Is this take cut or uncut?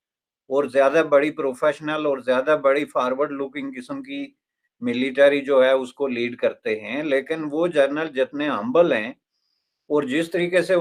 uncut